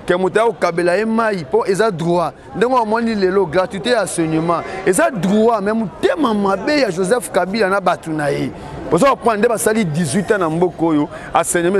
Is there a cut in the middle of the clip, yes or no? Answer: no